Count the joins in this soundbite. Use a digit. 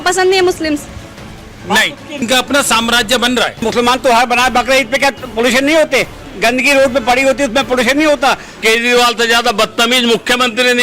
3